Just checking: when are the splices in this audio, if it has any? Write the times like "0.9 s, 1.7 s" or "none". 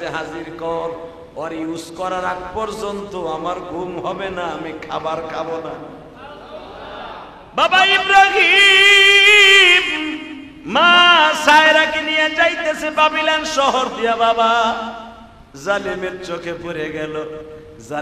7.5 s